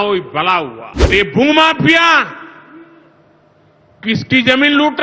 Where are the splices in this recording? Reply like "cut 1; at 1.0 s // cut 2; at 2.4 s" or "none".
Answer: cut 1; at 1.1 s